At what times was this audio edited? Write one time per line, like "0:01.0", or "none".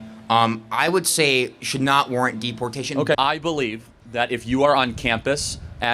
0:03.1